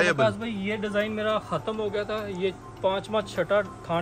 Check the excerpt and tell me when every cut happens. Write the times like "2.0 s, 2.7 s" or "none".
none